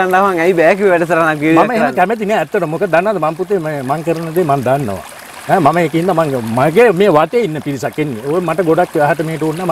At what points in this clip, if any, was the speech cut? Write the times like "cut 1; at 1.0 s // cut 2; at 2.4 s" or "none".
none